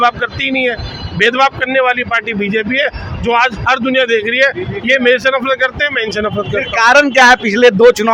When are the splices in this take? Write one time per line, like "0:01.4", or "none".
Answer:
none